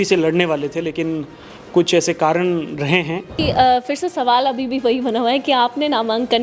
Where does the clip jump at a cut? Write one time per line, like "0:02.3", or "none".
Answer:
0:03.3